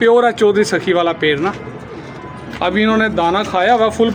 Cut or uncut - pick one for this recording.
uncut